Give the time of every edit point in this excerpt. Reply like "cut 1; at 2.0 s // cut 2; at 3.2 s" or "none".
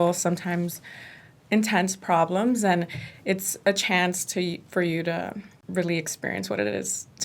cut 1; at 5.5 s